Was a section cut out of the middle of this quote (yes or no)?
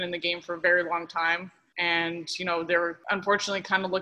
yes